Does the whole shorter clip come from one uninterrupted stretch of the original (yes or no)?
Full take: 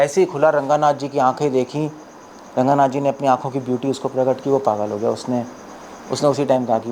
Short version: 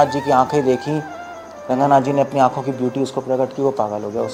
yes